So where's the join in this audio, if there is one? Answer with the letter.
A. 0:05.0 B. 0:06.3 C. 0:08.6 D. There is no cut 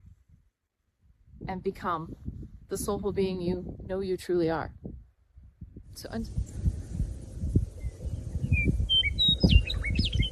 B